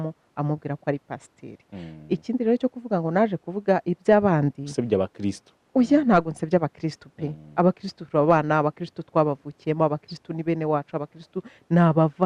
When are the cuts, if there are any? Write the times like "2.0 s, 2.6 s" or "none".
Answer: none